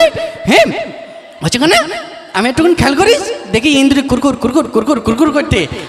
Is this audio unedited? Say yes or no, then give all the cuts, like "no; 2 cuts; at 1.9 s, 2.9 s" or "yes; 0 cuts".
yes; 0 cuts